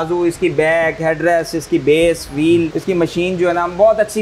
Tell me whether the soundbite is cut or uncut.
cut